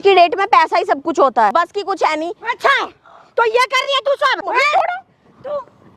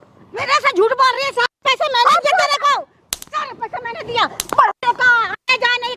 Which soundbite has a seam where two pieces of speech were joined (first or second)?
first